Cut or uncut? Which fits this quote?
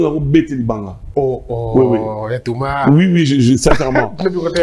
uncut